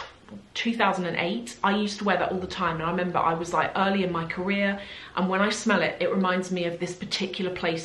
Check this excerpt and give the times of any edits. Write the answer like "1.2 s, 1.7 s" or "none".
none